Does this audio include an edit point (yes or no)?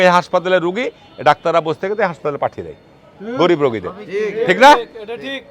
no